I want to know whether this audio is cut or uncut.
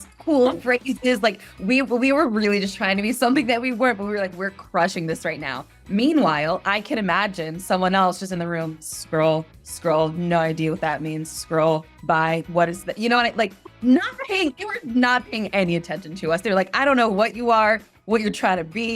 uncut